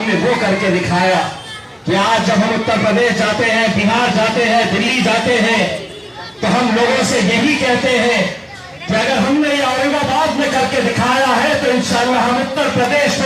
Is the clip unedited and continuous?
yes; 0 cuts

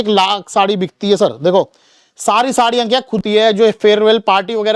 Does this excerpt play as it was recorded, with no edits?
no; 1 cut; at 3.2 s

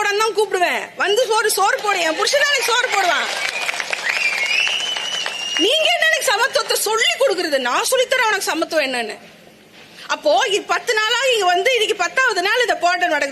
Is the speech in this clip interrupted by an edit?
no; 0 cuts

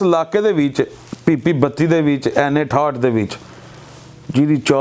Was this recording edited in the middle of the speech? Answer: no; 0 cuts

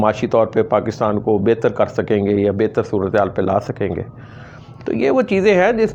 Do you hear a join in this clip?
no; 0 cuts

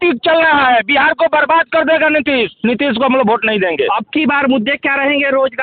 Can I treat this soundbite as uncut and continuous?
yes; 0 cuts

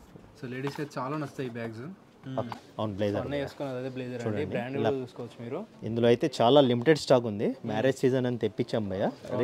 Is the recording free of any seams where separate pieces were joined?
no; 1 cut; at 2.6 s

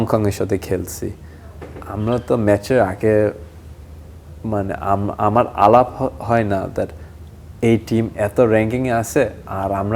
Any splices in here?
no; 0 cuts

